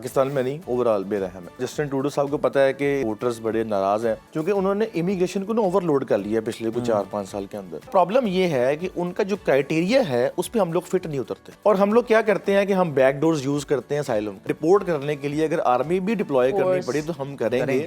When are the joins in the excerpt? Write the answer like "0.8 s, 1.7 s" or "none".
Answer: 1.7 s, 3.0 s, 4.3 s, 7.9 s, 11.4 s, 14.4 s

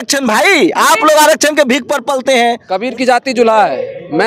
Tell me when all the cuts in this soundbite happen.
2.7 s

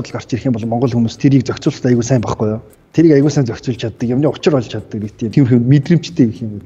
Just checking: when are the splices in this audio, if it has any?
5.3 s

